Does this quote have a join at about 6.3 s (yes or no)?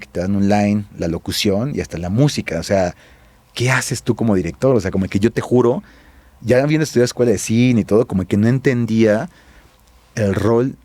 no